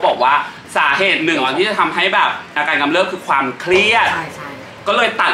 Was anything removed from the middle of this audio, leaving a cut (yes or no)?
yes